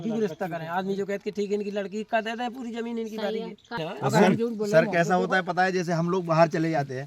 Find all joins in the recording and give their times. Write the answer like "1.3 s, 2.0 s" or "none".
3.8 s